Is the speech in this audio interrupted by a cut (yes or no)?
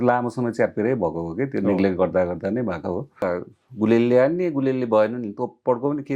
yes